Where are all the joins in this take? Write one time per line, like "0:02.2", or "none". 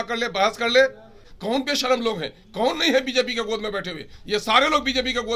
0:01.3